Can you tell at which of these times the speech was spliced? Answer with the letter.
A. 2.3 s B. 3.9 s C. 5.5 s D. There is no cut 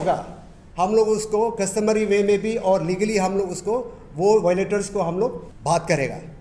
C